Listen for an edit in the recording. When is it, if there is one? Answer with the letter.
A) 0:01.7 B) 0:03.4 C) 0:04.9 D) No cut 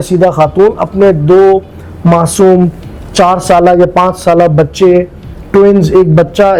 D